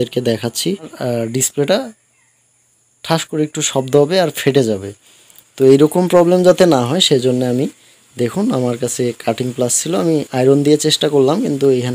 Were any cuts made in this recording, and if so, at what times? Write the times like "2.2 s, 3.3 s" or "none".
0.9 s